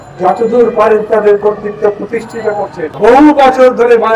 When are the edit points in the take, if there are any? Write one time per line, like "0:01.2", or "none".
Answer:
0:02.9